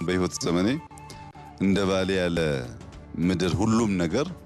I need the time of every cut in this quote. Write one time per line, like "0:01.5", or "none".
none